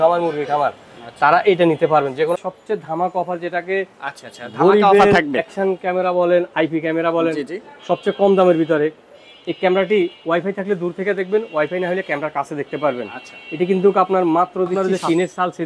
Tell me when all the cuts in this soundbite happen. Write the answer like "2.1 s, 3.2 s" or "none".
2.4 s, 14.7 s